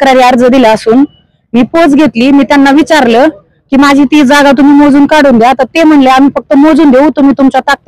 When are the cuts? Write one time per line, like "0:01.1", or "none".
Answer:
none